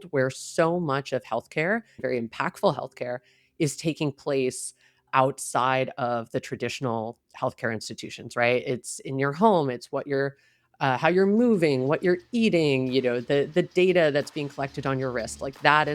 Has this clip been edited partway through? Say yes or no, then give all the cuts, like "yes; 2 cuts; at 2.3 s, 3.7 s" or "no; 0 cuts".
yes; 1 cut; at 2.0 s